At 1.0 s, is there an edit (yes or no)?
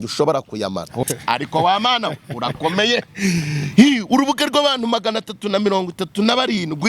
yes